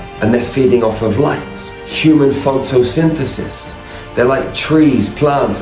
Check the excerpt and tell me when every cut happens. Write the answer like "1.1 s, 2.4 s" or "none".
none